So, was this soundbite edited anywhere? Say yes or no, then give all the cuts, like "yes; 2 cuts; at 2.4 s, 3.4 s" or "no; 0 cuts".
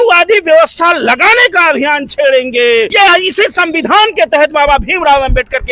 yes; 1 cut; at 2.9 s